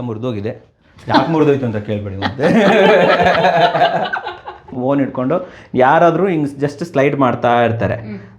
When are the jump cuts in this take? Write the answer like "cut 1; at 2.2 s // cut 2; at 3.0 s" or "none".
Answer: cut 1; at 4.8 s

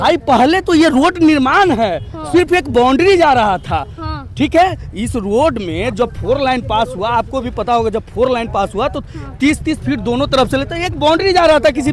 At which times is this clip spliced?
none

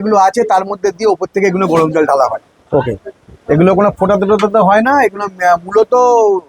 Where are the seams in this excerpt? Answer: none

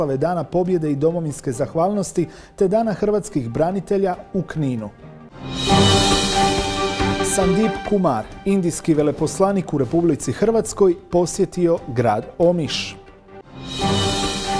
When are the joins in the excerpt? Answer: none

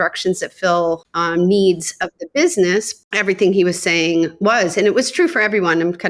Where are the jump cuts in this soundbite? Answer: cut 1; at 1.1 s // cut 2; at 2.9 s

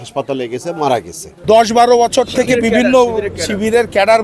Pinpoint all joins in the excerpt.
cut 1; at 1.4 s

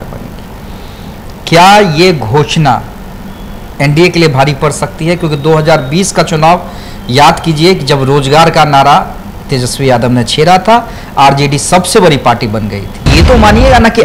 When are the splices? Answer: cut 1; at 13.1 s

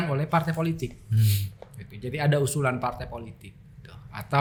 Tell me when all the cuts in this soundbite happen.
none

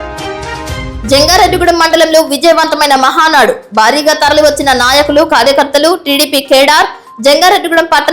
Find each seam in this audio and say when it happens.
cut 1; at 0.9 s

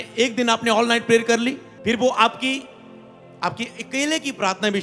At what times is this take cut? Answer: cut 1; at 1.7 s

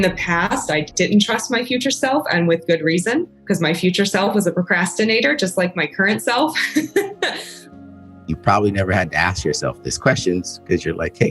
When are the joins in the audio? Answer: cut 1; at 0.9 s // cut 2; at 3.3 s // cut 3; at 7.7 s

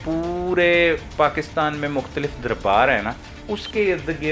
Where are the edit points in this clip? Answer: none

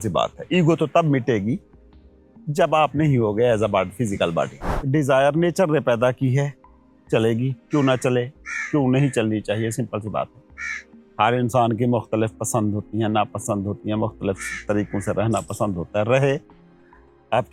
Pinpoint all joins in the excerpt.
cut 1; at 4.7 s

